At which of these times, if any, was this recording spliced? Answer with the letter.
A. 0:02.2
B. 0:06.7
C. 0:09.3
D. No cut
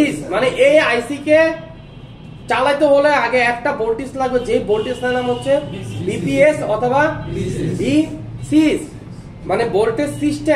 D